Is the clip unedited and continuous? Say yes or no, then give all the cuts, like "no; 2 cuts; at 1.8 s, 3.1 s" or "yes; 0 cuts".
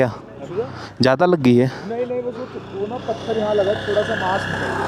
yes; 0 cuts